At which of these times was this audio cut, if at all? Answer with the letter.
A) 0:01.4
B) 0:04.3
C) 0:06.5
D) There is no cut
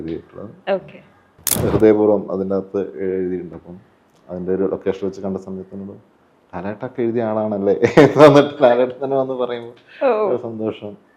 A